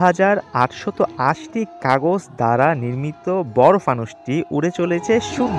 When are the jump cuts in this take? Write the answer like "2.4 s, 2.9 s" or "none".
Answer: none